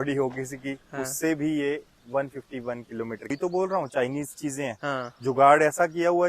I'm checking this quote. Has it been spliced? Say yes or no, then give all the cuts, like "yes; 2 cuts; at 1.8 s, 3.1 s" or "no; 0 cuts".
yes; 1 cut; at 3.3 s